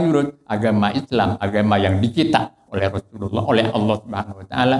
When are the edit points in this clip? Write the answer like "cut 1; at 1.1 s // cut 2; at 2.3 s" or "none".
none

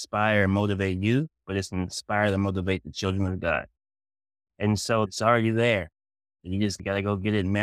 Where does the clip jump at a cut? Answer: cut 1; at 5.1 s // cut 2; at 6.8 s

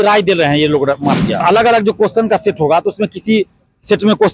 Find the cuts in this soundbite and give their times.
cut 1; at 1.4 s

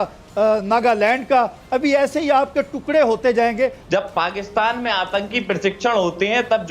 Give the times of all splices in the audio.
cut 1; at 3.8 s

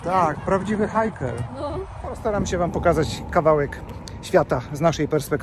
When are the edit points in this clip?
cut 1; at 2.1 s

